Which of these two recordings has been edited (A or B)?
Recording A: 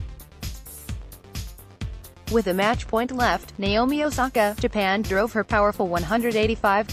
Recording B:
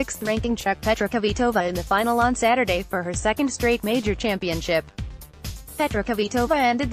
A